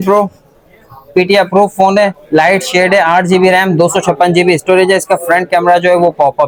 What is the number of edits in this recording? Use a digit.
0